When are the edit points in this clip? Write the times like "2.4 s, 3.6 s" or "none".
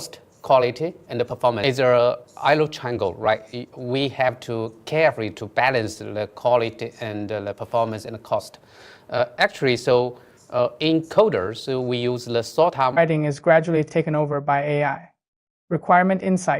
1.6 s, 13.0 s